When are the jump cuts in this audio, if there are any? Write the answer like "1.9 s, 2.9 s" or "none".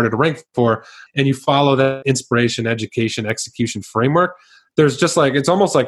0.9 s, 2.0 s